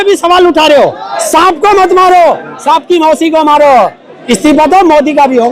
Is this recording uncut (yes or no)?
no